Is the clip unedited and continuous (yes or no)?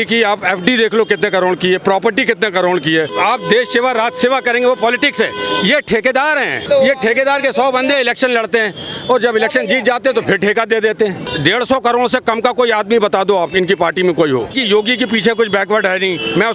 no